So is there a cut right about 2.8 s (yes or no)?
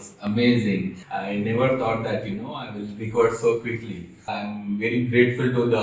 no